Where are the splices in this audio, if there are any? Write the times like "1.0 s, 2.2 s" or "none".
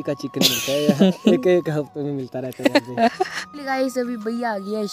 3.4 s